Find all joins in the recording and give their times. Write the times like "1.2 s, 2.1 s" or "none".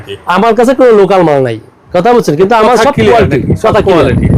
none